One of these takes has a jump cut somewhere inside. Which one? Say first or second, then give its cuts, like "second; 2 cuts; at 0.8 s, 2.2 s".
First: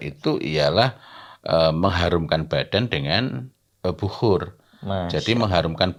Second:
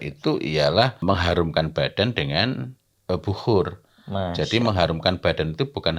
second; 1 cut; at 1.0 s